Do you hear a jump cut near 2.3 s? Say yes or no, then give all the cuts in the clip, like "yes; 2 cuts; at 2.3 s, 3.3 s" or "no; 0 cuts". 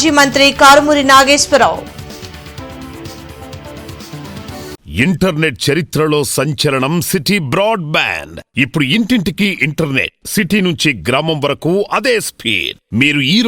no; 1 cut; at 4.8 s